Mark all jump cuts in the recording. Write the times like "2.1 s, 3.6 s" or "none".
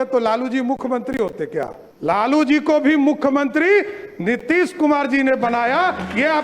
1.8 s